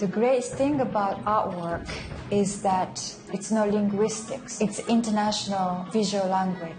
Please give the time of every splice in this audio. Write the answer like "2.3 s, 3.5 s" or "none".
3.3 s, 5.8 s

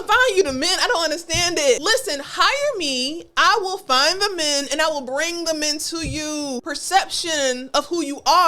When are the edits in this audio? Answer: 1.8 s, 6.6 s

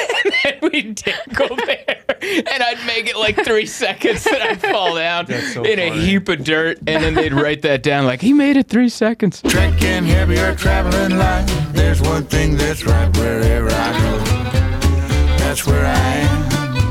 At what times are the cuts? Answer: 9.4 s

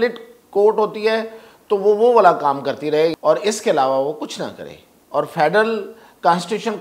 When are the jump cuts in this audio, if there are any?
3.1 s

